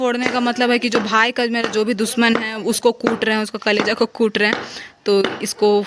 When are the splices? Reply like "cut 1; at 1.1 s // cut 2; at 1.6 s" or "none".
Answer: none

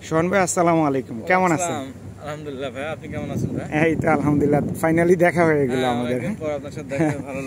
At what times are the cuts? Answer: none

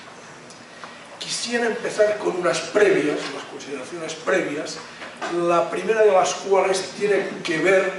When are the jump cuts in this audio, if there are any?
cut 1; at 4.0 s

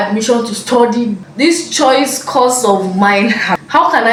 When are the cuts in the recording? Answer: none

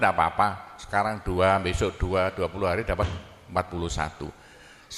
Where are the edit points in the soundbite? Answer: none

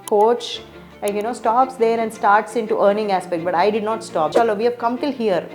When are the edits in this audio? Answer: cut 1; at 4.3 s

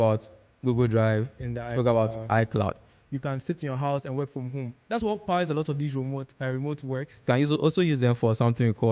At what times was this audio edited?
cut 1; at 3.0 s // cut 2; at 7.2 s

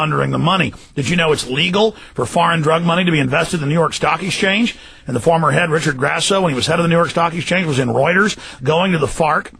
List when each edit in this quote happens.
none

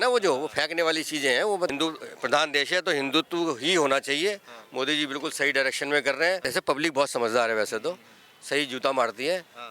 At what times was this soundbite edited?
cut 1; at 1.7 s // cut 2; at 6.5 s

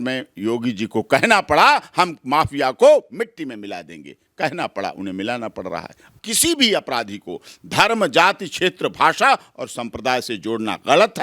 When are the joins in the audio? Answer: cut 1; at 6.1 s

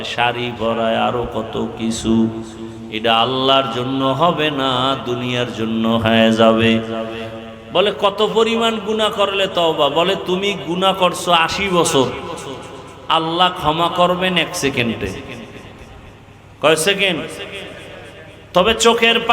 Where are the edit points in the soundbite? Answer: cut 1; at 7.2 s

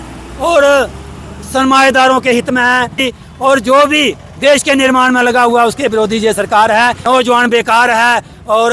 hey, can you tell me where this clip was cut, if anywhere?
cut 1; at 3.2 s // cut 2; at 7.0 s

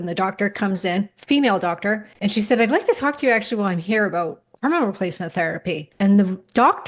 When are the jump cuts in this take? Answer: cut 1; at 2.1 s // cut 2; at 5.9 s

